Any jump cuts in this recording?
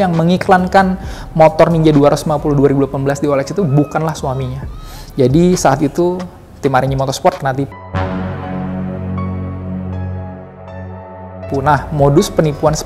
yes; 1 cut; at 7.7 s

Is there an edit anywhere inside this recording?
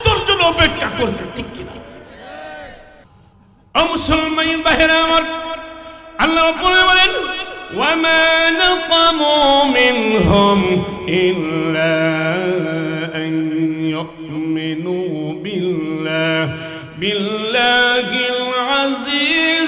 yes; 1 cut; at 3.0 s

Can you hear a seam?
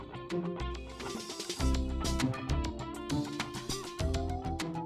yes; 1 cut; at 0.9 s

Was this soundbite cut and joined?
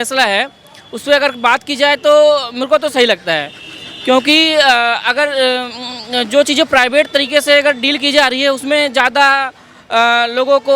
no; 0 cuts

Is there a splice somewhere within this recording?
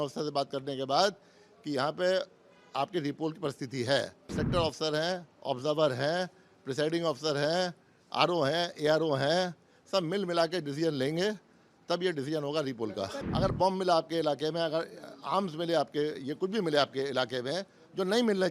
yes; 2 cuts; at 4.4 s, 13.2 s

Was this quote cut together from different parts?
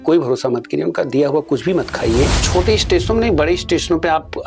yes; 1 cut; at 2.4 s

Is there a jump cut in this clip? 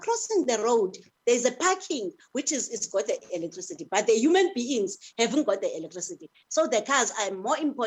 no; 0 cuts

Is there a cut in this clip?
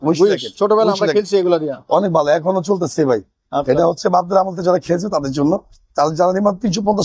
no; 0 cuts

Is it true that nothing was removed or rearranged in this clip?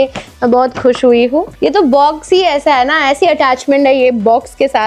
no; 1 cut; at 1.5 s

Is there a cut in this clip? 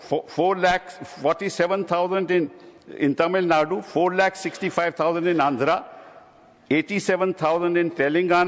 no; 0 cuts

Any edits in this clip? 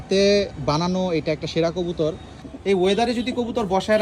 yes; 1 cut; at 2.4 s

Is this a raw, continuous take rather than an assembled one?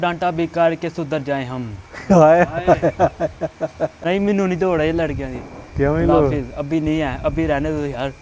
no; 1 cut; at 3.9 s

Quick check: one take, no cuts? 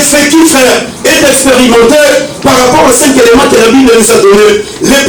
yes; 0 cuts

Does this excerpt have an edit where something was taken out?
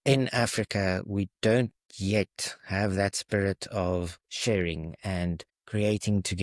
no; 0 cuts

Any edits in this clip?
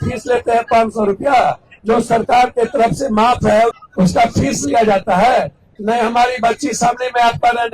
yes; 3 cuts; at 1.7 s, 3.8 s, 5.6 s

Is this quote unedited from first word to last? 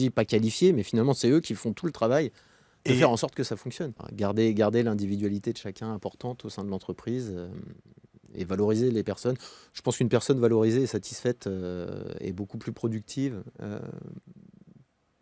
no; 1 cut; at 3.9 s

